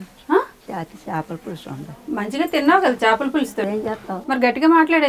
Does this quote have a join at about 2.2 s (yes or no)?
no